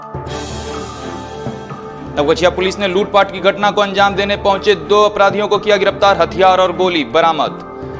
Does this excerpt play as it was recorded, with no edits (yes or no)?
no